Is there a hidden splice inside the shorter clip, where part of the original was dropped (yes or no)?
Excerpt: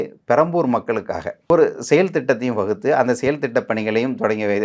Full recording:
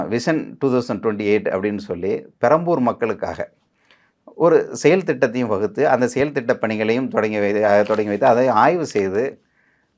yes